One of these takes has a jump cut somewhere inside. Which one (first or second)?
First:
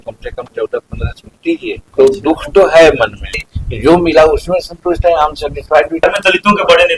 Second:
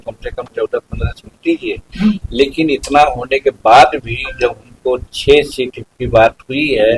first